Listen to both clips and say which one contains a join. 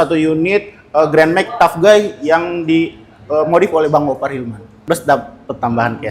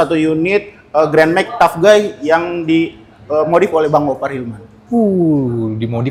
first; 1 cut; at 4.7 s

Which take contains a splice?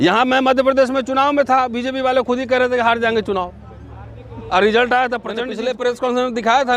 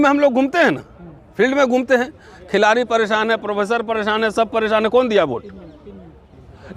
first; 1 cut; at 5.5 s

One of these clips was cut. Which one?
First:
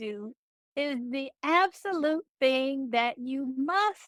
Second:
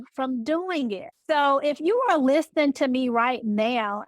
second; 1 cut; at 1.1 s

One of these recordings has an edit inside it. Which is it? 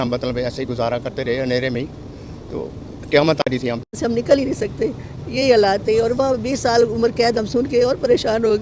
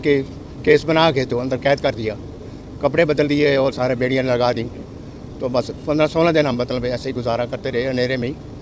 first; 1 cut; at 4.0 s

